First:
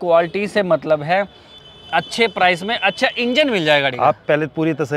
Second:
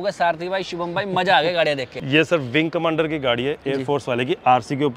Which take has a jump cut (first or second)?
second